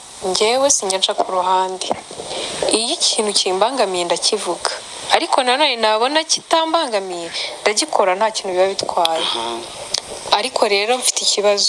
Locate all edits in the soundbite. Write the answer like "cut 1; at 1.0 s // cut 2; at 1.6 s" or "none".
none